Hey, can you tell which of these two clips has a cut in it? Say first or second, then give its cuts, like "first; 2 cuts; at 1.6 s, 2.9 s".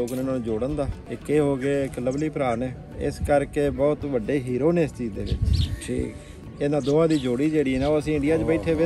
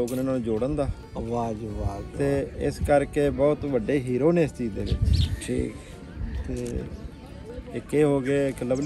first; 3 cuts; at 1.0 s, 2.9 s, 6.4 s